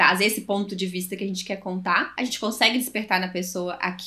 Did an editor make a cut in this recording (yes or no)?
yes